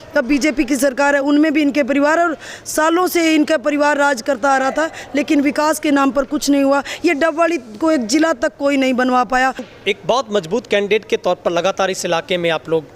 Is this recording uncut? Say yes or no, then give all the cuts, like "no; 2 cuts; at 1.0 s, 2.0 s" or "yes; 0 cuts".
no; 1 cut; at 9.7 s